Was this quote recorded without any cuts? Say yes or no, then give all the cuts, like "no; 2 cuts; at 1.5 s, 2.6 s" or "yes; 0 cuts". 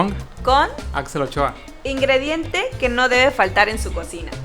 no; 1 cut; at 1.7 s